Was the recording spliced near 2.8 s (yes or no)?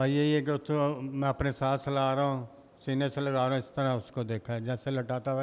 no